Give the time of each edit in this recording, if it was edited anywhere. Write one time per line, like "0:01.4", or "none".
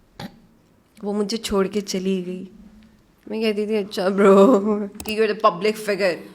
0:05.0